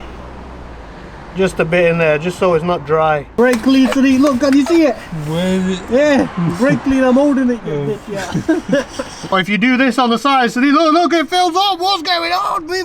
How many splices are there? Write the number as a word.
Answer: two